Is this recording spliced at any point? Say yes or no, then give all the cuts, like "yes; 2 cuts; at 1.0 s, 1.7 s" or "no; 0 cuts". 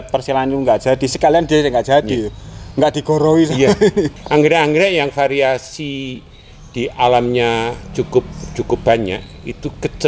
yes; 1 cut; at 4.2 s